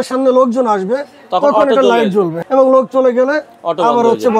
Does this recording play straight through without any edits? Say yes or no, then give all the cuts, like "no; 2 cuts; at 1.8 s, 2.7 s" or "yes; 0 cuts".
no; 1 cut; at 2.4 s